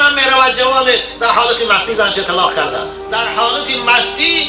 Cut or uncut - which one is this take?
cut